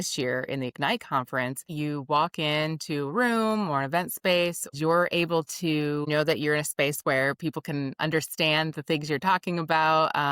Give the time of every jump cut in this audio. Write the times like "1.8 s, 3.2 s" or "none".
1.7 s, 4.7 s, 6.1 s